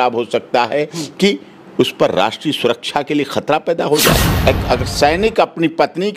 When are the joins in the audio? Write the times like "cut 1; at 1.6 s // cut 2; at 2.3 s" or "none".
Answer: cut 1; at 4.3 s